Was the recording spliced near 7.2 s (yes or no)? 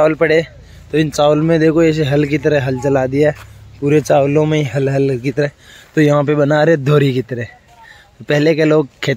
no